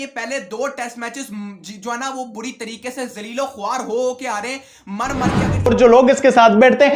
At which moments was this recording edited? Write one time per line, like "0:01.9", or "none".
0:05.7